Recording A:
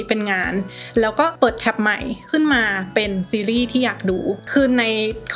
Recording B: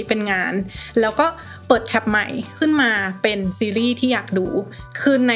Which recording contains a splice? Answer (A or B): A